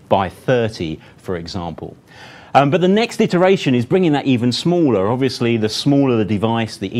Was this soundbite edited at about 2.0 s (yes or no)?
no